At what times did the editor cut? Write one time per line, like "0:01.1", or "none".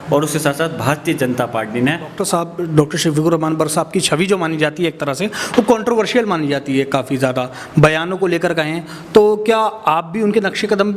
0:02.2